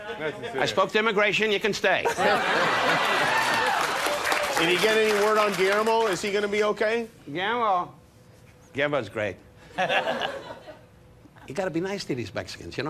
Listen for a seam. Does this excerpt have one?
yes; 1 cut; at 6.7 s

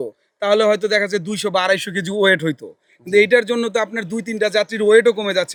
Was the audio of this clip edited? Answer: no; 0 cuts

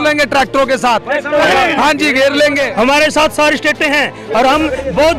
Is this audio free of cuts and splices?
no; 1 cut; at 2.7 s

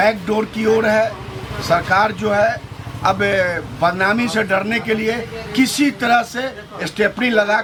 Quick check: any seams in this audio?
no; 0 cuts

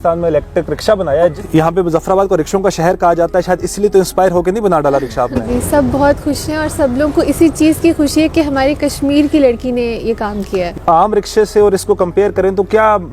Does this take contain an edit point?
yes; 3 cuts; at 1.4 s, 5.4 s, 10.7 s

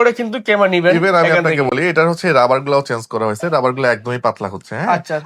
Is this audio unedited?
yes; 0 cuts

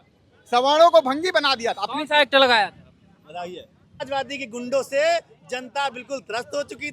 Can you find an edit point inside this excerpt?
yes; 1 cut; at 4.0 s

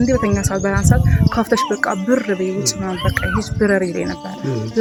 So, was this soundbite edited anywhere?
no; 0 cuts

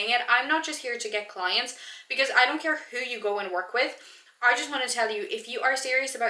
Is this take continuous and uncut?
yes; 0 cuts

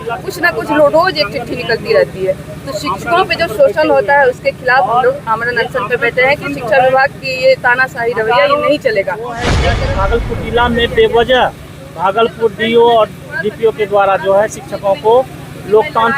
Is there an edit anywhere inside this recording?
yes; 1 cut; at 9.6 s

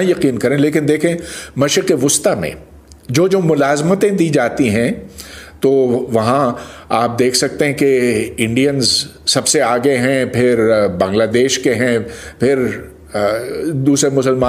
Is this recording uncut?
yes; 0 cuts

